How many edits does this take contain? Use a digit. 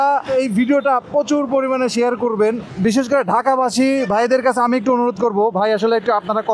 1